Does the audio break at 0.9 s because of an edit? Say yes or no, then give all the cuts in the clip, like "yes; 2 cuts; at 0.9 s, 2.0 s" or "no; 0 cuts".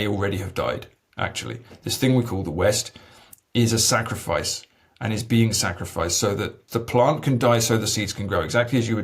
no; 1 cut; at 6.6 s